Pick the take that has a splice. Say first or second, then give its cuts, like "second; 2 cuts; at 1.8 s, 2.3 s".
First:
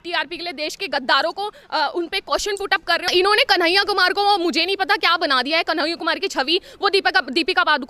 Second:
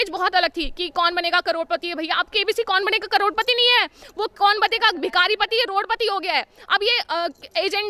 first; 1 cut; at 3.1 s